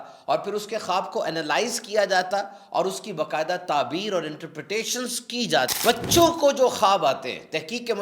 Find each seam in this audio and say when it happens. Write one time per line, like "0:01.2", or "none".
0:05.8